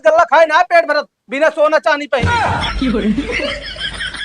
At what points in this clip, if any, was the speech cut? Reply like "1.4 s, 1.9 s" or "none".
2.2 s